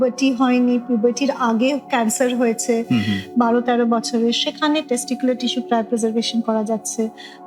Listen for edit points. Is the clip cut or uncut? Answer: uncut